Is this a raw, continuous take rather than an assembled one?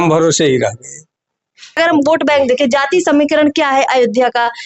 no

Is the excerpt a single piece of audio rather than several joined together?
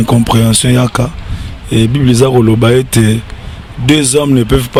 yes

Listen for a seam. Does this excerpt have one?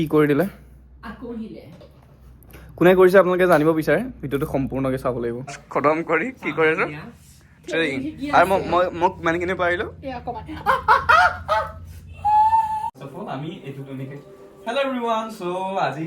yes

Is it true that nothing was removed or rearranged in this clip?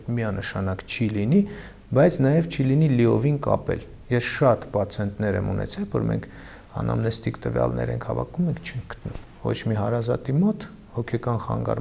yes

